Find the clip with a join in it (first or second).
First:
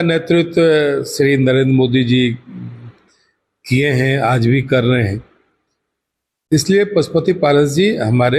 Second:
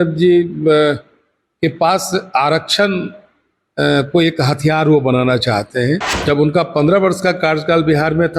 second